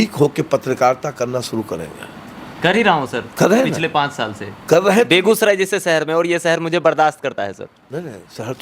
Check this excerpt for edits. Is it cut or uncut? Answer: uncut